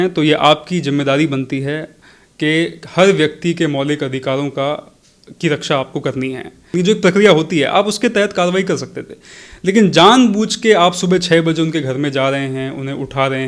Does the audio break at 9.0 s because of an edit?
no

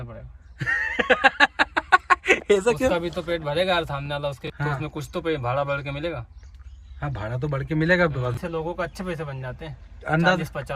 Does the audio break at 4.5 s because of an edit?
yes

